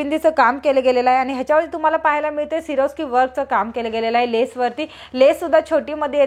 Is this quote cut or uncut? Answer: uncut